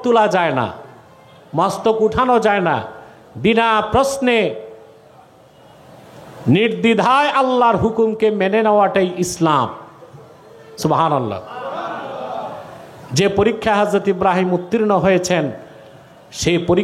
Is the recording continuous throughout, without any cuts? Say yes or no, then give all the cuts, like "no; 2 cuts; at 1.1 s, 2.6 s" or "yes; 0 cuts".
yes; 0 cuts